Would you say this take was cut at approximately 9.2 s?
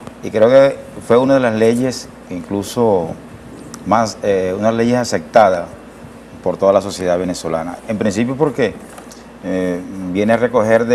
no; 0 cuts

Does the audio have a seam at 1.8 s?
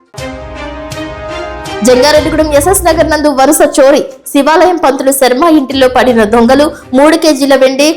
yes; 1 cut; at 1.8 s

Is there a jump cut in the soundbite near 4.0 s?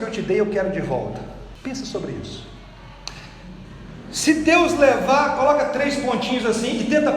no; 1 cut; at 1.5 s

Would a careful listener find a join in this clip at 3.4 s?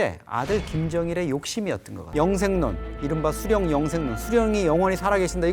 no; 1 cut; at 2.1 s

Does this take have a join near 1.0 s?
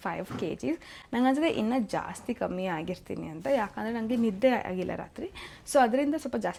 no; 0 cuts

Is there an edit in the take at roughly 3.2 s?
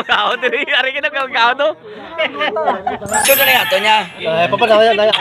yes; 1 cut; at 3.2 s

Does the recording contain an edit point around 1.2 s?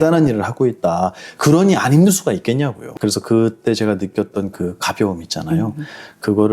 no; 1 cut; at 2.9 s

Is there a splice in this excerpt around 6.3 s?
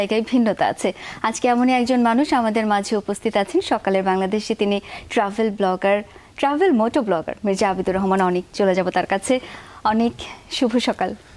no; 0 cuts

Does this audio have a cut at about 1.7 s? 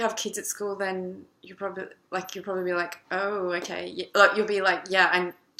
yes; 1 cut; at 1.7 s

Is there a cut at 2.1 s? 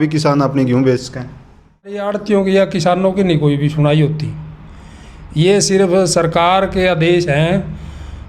yes; 1 cut; at 2.1 s

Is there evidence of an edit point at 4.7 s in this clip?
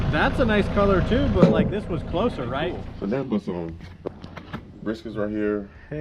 no; 1 cut; at 2.8 s

